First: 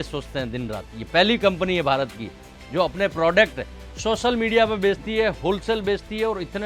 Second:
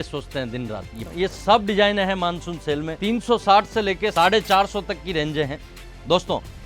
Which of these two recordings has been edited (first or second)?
second